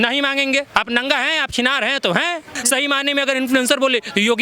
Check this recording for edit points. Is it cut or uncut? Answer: cut